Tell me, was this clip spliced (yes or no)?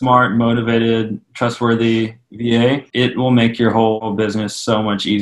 yes